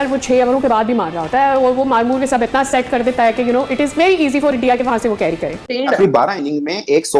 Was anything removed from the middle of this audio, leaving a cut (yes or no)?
yes